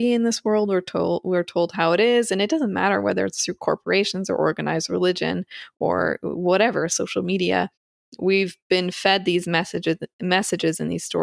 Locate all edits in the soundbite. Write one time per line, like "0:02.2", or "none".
none